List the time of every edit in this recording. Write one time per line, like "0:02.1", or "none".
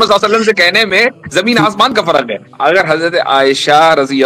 0:02.5